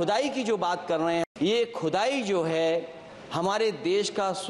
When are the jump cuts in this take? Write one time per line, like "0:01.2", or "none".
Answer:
0:01.3

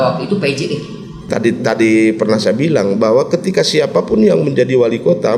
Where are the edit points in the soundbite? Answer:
0:01.2

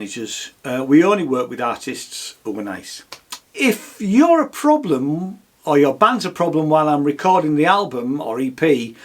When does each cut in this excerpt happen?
0:03.3

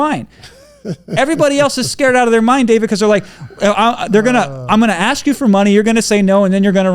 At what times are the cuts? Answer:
none

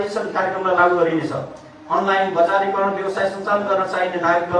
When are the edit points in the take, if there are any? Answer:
none

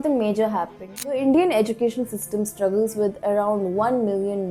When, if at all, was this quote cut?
0:01.1

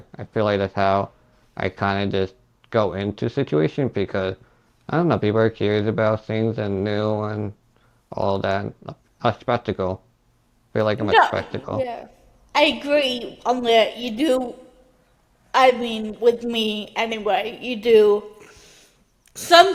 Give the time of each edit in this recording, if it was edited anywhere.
none

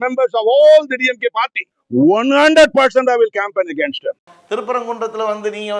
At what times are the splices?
none

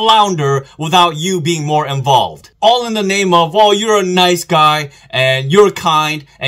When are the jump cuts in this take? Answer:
0:02.4

